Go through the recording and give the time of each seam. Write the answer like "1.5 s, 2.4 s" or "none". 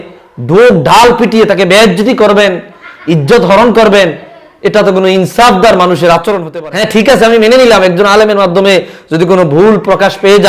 6.5 s